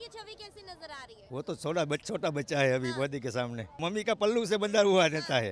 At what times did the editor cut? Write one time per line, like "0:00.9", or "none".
0:03.8